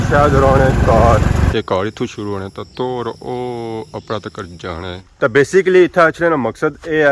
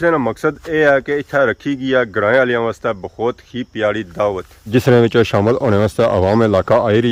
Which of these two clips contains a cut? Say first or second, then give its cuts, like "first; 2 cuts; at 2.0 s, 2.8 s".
first; 2 cuts; at 1.5 s, 4.9 s